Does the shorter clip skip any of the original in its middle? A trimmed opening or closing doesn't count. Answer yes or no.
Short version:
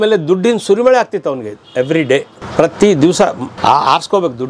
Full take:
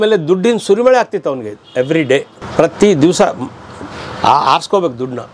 yes